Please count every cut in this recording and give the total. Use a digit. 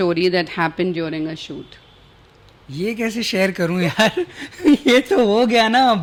0